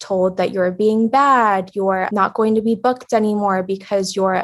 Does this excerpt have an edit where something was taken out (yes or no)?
yes